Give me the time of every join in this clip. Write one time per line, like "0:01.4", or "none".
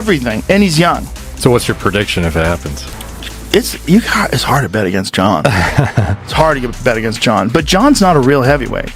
0:05.9